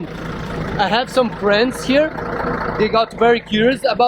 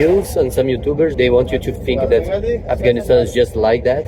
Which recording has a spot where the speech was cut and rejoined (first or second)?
second